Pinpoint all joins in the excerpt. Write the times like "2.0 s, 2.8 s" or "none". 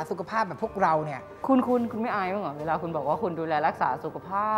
1.5 s